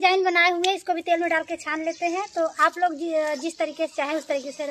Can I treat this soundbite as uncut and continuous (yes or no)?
yes